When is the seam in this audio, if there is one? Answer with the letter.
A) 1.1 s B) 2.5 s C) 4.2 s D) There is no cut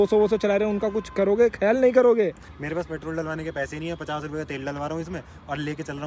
B